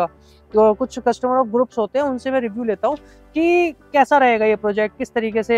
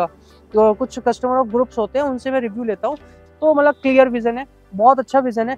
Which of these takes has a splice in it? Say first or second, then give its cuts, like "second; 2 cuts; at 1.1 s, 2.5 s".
second; 1 cut; at 3.2 s